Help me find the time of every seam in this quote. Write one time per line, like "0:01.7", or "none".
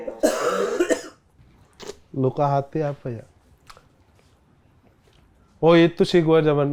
none

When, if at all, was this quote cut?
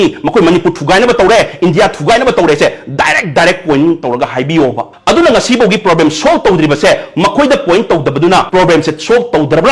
0:04.9
0:08.5

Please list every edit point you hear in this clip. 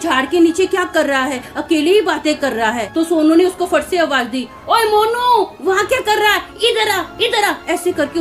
none

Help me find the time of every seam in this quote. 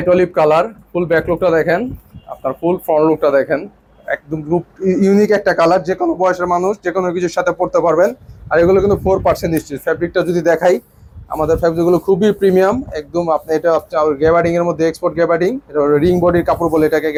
none

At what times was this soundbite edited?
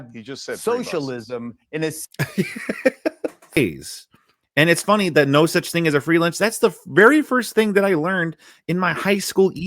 0:03.6

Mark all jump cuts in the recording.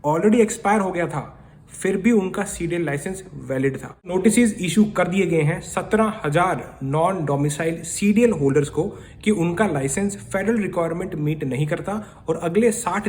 0:03.9

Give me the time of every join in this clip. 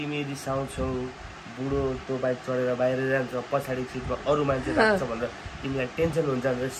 none

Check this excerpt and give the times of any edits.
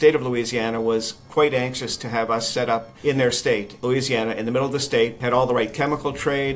0:02.9
0:03.8
0:05.2

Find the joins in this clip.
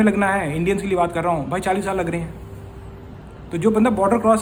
none

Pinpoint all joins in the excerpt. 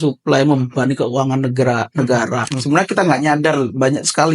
0:02.5

